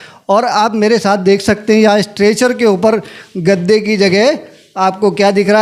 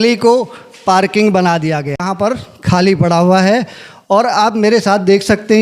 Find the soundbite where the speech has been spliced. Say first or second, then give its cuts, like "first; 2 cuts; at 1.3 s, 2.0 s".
second; 1 cut; at 2.0 s